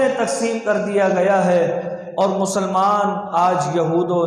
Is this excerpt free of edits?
yes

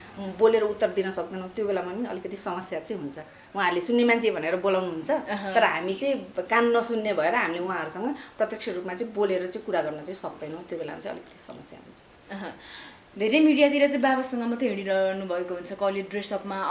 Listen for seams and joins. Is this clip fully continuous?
yes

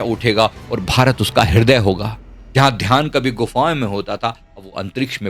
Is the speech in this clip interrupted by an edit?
no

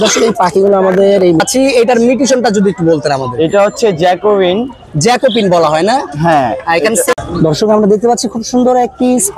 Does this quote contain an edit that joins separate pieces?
yes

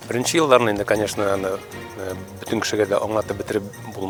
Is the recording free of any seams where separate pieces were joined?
yes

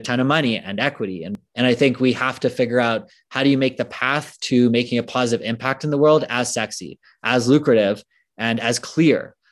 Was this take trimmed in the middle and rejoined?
yes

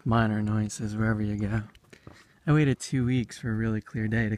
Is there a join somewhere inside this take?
yes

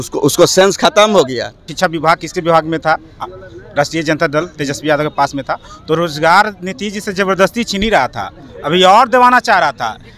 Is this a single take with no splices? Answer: no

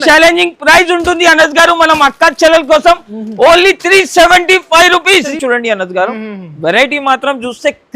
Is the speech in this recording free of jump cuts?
no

